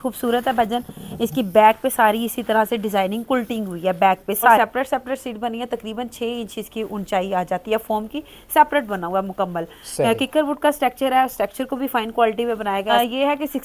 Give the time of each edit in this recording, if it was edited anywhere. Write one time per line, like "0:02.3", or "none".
0:04.6
0:12.9